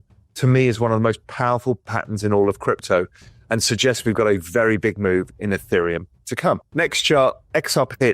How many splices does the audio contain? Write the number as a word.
one